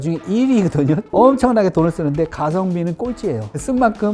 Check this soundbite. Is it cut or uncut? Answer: cut